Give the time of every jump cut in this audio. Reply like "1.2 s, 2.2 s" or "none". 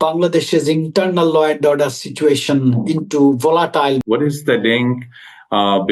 4.0 s